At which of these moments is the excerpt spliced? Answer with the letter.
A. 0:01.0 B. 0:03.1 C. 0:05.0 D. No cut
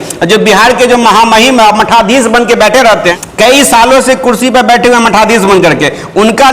B